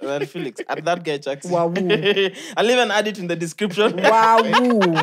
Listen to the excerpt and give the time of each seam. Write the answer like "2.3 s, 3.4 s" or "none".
none

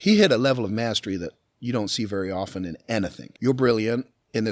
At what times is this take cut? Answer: 3.2 s

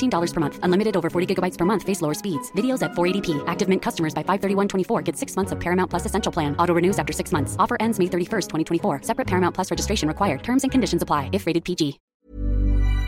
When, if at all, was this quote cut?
12.1 s

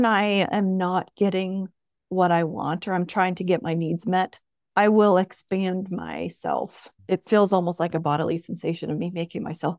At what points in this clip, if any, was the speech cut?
none

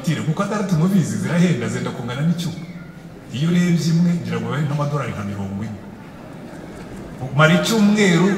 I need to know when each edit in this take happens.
none

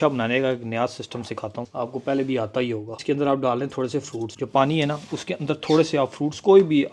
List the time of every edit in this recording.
none

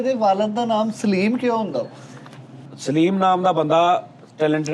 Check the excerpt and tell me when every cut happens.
2.7 s

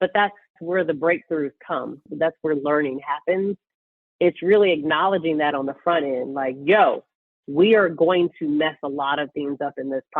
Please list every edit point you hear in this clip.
2.0 s, 3.7 s

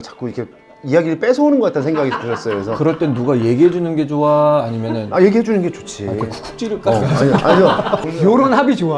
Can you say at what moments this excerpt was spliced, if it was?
8.1 s

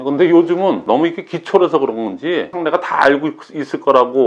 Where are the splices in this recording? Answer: 0.8 s, 2.5 s

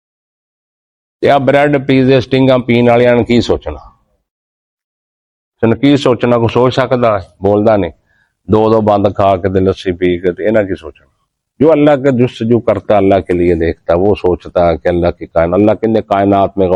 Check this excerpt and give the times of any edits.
none

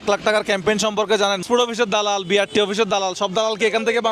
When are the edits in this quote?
1.4 s

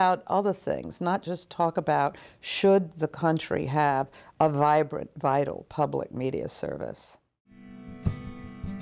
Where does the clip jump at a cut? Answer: 7.7 s

